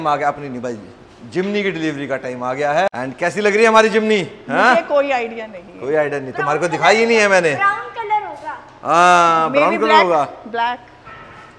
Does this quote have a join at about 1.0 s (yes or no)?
no